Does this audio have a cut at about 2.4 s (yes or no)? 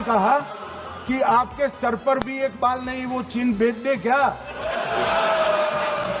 no